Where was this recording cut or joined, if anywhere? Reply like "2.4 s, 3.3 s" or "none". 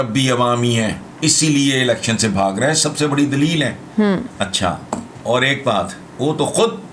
1.1 s, 5.1 s, 6.0 s